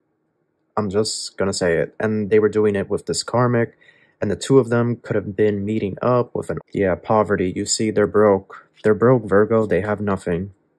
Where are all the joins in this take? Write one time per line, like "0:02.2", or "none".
0:06.5